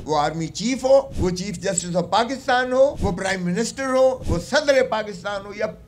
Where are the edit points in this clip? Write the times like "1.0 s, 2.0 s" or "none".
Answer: none

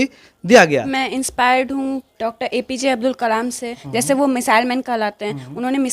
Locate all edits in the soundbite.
0.9 s, 2.1 s, 3.8 s

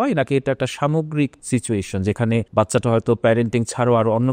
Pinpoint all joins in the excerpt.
1.4 s, 2.5 s

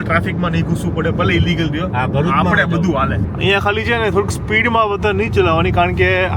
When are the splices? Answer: 3.3 s

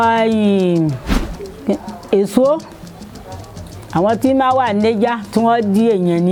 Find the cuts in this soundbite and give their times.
none

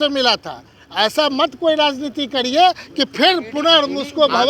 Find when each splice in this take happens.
none

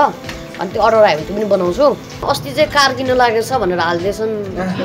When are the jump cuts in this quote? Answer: 2.2 s

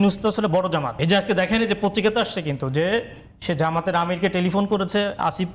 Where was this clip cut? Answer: 0.9 s

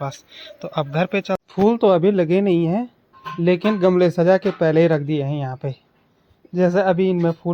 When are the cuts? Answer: 1.4 s

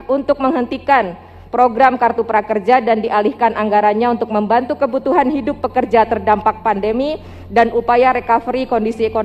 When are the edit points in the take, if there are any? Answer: none

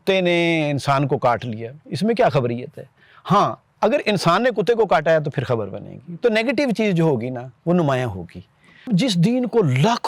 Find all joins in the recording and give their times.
8.9 s

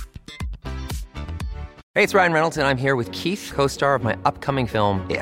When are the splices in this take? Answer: 1.8 s

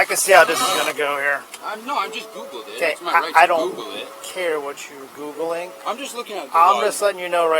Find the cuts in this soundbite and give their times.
1.5 s

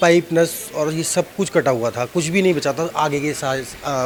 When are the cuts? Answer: none

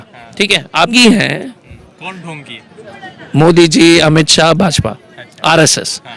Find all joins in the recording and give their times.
0.9 s

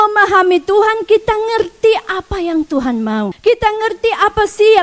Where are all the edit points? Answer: 3.3 s

